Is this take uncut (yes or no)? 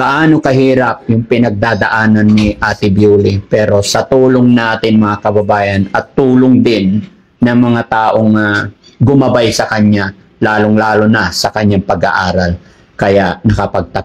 yes